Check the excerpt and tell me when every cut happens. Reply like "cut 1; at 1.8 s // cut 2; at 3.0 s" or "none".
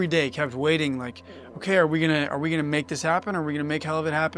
none